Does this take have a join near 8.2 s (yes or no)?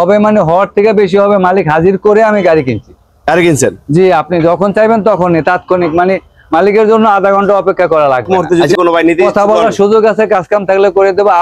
yes